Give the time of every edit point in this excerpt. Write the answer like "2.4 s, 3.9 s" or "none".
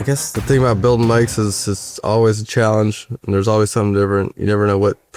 none